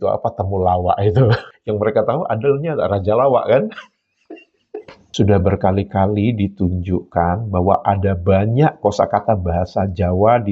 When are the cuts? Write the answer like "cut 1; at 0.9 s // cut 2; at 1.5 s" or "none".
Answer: cut 1; at 1.5 s // cut 2; at 5.1 s